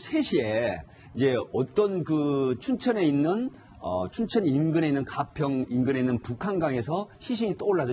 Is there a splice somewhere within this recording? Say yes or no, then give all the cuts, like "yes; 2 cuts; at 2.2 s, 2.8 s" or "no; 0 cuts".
yes; 1 cut; at 2.7 s